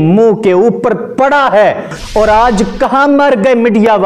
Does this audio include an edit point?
yes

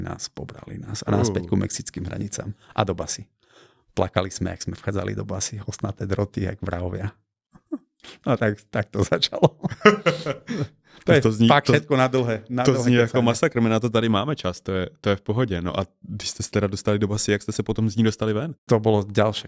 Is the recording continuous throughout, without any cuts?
yes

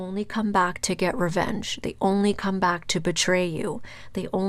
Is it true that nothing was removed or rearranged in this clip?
yes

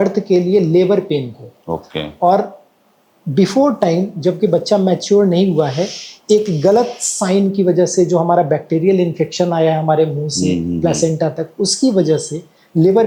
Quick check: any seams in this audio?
no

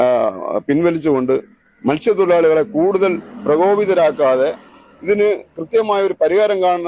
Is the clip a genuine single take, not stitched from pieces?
yes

